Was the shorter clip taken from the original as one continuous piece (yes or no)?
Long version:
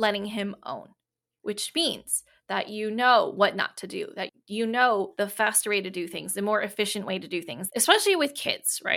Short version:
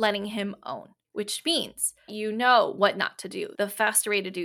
no